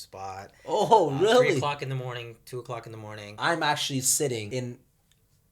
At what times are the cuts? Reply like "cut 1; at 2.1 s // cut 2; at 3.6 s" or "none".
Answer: cut 1; at 3.3 s // cut 2; at 4.5 s